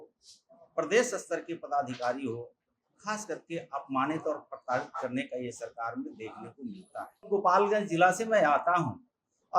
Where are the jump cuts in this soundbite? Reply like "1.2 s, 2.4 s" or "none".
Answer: 7.2 s